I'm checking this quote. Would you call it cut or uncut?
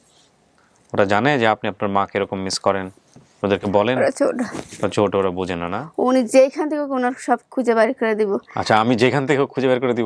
cut